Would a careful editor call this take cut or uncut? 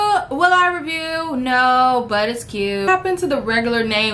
cut